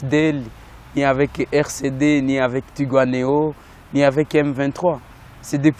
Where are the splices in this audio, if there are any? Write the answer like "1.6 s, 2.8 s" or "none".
none